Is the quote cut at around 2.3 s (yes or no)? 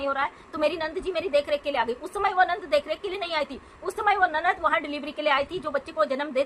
no